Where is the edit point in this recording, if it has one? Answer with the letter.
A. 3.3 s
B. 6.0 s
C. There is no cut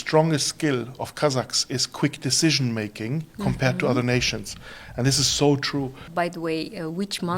B